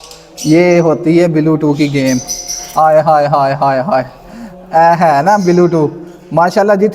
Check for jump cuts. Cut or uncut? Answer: uncut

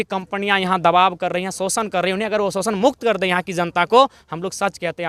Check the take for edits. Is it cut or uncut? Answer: uncut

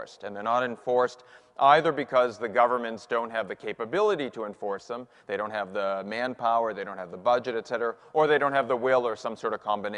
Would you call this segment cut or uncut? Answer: cut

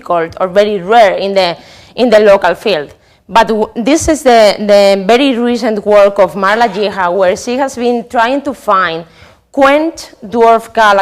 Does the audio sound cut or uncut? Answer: cut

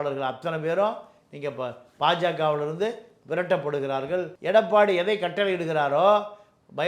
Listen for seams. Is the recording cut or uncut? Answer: cut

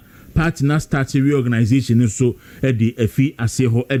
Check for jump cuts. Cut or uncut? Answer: uncut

